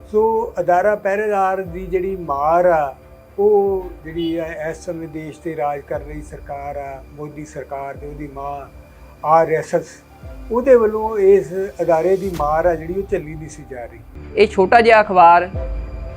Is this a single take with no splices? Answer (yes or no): no